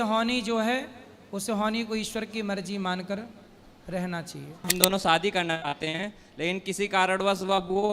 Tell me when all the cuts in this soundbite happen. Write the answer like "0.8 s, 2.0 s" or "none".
4.7 s